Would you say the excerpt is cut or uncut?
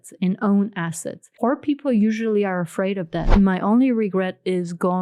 cut